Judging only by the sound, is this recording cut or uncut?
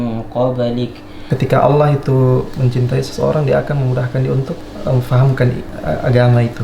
cut